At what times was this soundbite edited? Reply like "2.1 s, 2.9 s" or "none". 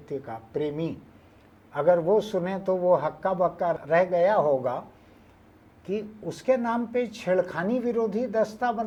none